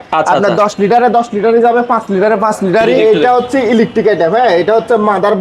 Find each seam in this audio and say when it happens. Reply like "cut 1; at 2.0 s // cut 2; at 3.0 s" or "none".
cut 1; at 3.0 s

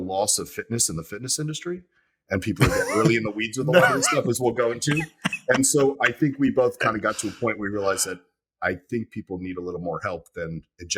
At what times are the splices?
none

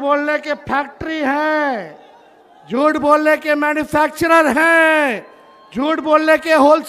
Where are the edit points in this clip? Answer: none

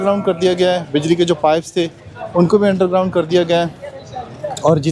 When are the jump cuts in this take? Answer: none

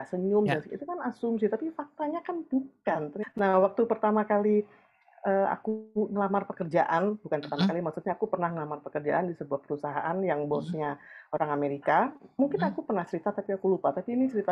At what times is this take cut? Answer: cut 1; at 3.2 s

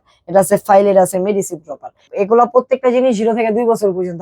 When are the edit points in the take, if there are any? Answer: cut 1; at 2.1 s

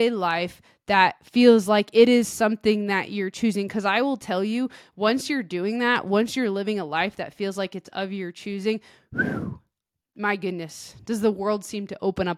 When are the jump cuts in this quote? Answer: none

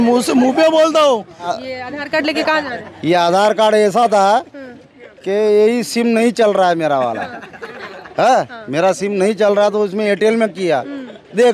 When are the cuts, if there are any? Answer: cut 1; at 1.6 s

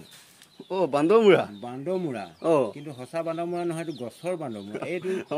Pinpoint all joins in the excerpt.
none

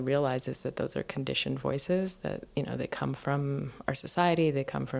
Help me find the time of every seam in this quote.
none

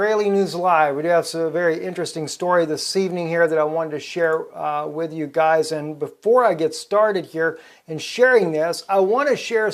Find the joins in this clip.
none

